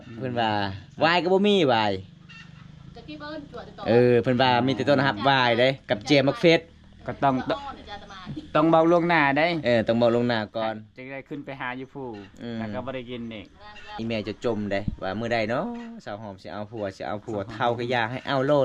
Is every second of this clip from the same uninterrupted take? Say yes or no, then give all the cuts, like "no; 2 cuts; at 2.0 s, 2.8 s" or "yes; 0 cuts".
no; 1 cut; at 13.9 s